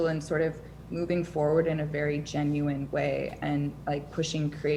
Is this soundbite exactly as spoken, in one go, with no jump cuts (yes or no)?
yes